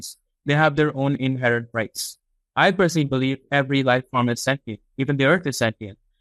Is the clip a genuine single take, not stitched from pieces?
yes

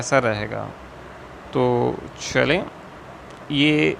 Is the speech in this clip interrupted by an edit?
no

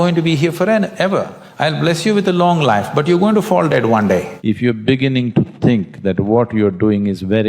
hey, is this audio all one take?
no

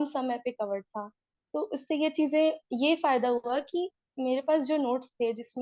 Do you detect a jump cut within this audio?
no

